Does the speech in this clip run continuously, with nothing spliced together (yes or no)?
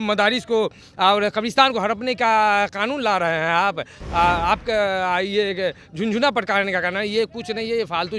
yes